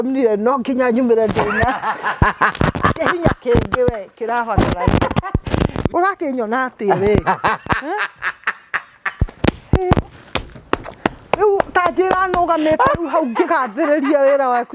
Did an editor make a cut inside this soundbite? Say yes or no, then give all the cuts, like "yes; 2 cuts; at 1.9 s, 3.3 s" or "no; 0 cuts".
yes; 1 cut; at 5.9 s